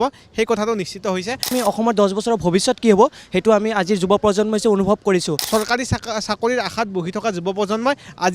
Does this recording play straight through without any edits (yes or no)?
no